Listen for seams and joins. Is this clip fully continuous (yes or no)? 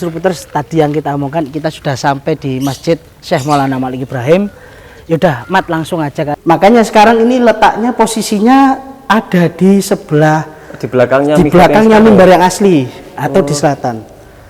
no